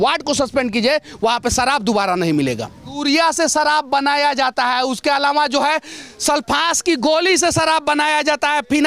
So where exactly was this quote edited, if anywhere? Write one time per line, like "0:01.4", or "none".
0:03.0